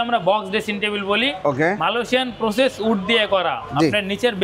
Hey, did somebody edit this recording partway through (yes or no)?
no